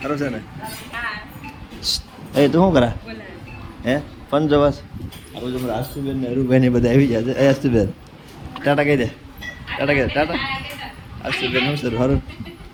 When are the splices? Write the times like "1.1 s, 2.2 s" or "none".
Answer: none